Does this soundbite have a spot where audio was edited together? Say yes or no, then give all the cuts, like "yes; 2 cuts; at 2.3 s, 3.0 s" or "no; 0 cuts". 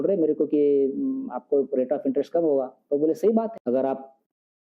yes; 1 cut; at 3.6 s